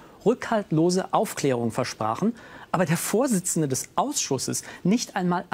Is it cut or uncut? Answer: uncut